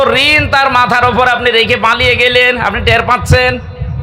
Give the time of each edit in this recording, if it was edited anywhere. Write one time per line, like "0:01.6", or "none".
none